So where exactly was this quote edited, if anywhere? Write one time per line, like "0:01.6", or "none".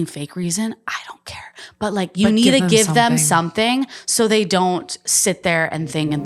none